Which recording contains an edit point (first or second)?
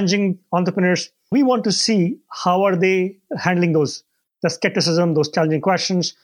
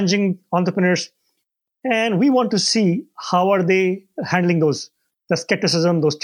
first